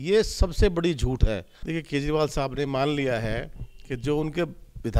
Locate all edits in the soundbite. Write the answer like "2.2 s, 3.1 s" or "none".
1.5 s